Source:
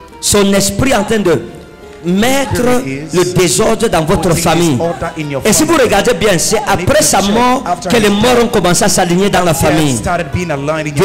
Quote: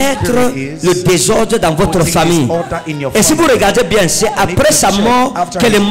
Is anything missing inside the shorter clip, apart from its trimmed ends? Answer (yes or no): no